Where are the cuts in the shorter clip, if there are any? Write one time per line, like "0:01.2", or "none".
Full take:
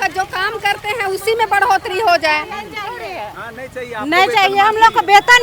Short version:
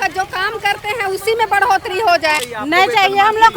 0:02.5